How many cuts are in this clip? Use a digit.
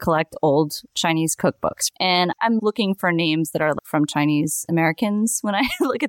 2